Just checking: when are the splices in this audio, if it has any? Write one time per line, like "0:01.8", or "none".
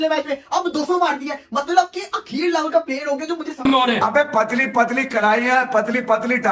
0:03.6